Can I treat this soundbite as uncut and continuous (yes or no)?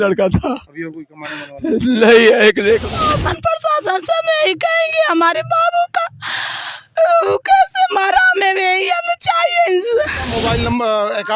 no